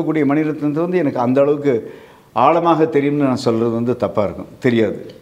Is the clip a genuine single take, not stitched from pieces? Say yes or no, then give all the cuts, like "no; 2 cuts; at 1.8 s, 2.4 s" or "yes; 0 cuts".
yes; 0 cuts